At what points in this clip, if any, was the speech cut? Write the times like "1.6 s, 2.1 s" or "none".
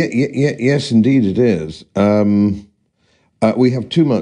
1.1 s

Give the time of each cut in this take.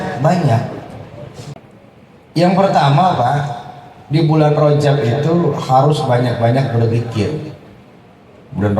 1.6 s

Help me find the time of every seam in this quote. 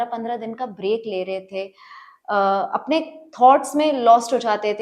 none

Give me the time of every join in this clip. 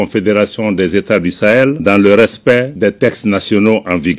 1.8 s, 2.7 s

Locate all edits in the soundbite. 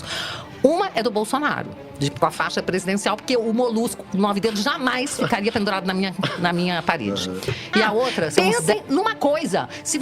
8.3 s

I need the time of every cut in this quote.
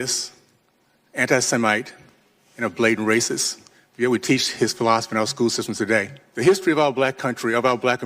6.2 s

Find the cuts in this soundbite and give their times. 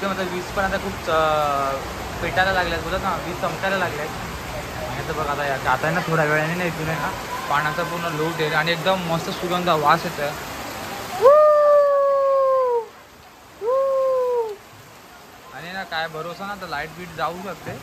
none

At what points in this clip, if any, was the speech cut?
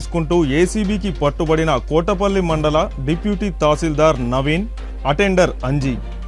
none

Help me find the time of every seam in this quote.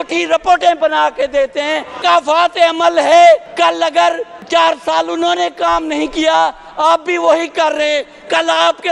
2.0 s, 3.9 s

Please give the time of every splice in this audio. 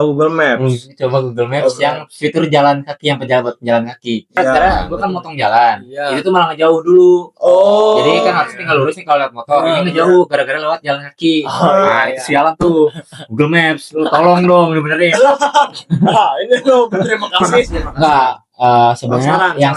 4.5 s, 17.8 s

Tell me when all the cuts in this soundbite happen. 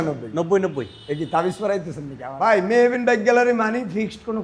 2.3 s

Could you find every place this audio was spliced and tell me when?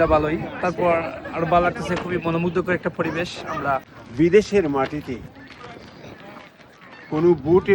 3.6 s

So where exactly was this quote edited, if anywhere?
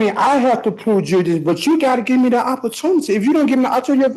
none

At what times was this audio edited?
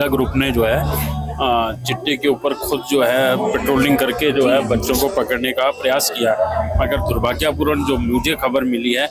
none

